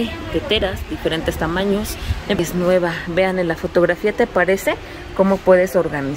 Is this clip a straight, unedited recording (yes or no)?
no